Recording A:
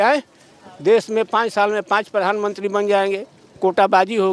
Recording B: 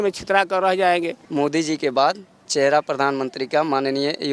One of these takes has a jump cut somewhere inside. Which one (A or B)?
B